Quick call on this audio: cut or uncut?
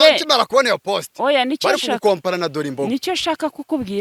uncut